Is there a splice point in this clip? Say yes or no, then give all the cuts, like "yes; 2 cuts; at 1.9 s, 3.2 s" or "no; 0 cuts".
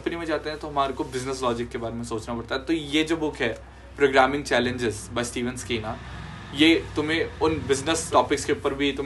yes; 1 cut; at 8.1 s